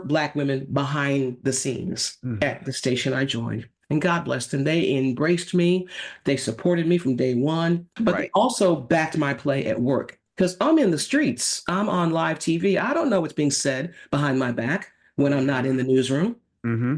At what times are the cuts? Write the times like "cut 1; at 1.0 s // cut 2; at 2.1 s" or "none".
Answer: cut 1; at 7.9 s